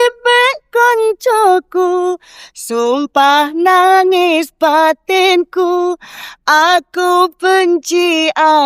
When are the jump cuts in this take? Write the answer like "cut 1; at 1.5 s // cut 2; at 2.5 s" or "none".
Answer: none